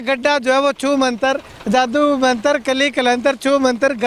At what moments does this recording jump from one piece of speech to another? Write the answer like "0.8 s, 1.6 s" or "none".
none

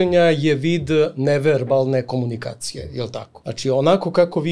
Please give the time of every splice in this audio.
3.3 s

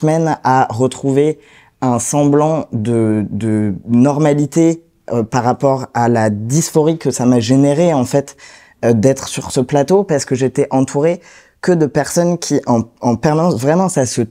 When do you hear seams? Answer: none

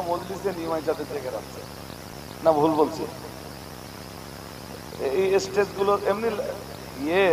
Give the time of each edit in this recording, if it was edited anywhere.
2.1 s

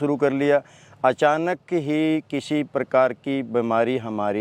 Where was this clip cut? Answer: none

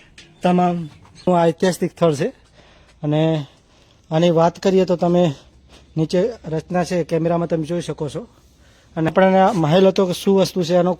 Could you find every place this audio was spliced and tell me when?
1.3 s, 9.1 s

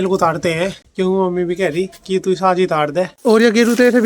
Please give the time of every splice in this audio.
3.1 s

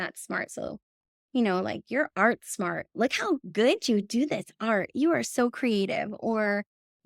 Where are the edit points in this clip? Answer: 2.8 s

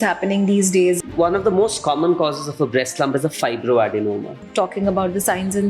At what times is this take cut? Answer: 1.0 s, 4.4 s

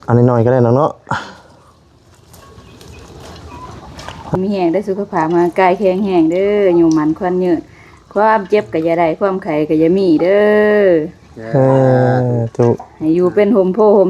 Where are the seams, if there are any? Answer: 4.4 s

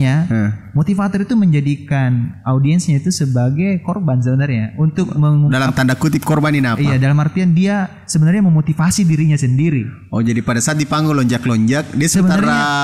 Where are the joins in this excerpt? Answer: none

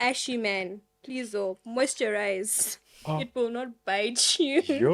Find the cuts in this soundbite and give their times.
none

